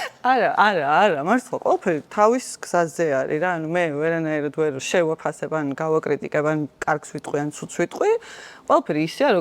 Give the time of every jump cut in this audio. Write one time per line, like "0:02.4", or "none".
0:04.8